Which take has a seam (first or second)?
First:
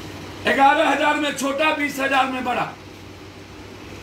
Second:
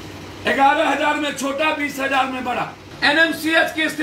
second